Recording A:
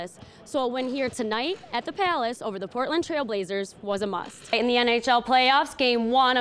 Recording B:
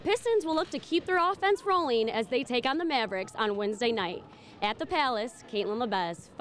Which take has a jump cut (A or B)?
A